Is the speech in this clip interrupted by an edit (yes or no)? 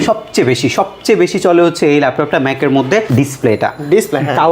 yes